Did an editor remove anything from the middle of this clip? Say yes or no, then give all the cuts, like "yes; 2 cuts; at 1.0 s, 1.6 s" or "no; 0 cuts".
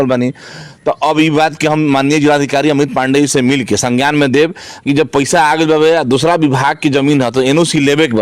no; 0 cuts